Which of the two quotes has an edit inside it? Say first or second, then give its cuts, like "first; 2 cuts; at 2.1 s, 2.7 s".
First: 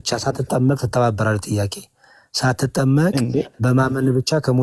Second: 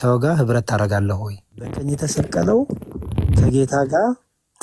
second; 1 cut; at 1.8 s